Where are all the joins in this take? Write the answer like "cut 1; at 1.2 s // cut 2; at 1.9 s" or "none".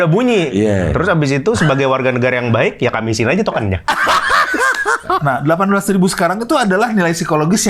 cut 1; at 5.1 s